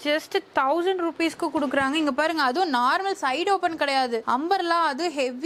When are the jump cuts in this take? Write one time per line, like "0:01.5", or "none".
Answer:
none